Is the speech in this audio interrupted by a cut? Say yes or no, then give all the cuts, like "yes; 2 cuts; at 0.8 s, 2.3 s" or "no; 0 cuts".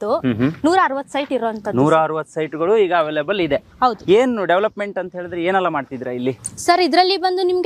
no; 0 cuts